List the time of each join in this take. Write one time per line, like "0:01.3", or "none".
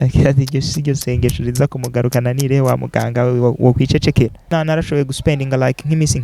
0:04.5